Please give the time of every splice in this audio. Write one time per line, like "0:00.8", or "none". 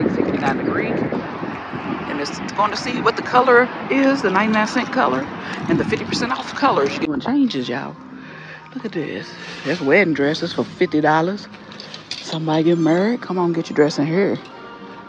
0:07.1